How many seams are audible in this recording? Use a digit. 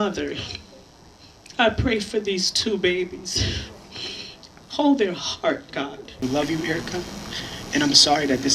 1